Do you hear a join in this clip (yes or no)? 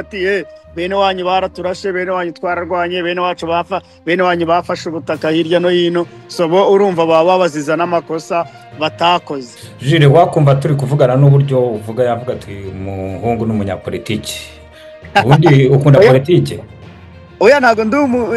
yes